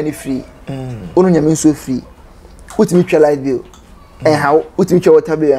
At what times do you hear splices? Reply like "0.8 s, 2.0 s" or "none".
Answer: 4.7 s